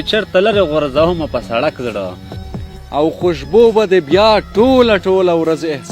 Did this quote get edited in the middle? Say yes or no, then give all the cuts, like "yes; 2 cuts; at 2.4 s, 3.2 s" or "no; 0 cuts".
yes; 1 cut; at 2.3 s